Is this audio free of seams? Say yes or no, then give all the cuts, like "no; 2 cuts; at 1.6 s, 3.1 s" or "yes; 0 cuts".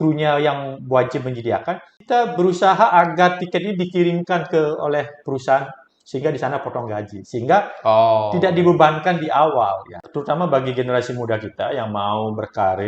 no; 2 cuts; at 1.9 s, 10.0 s